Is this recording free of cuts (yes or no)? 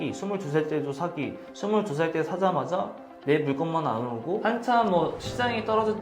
no